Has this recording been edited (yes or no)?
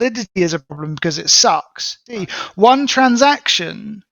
yes